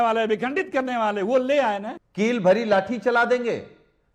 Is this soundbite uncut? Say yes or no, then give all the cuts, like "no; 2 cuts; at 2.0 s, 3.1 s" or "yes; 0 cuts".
no; 1 cut; at 2.0 s